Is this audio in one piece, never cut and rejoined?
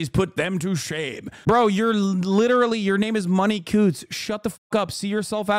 no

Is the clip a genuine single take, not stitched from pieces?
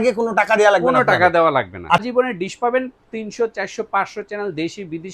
no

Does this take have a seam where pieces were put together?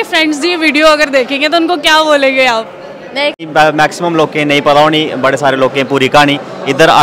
yes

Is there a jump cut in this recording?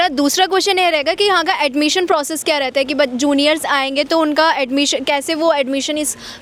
no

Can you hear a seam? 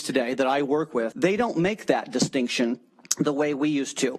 no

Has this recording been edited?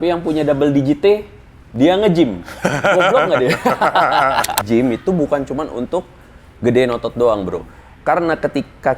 yes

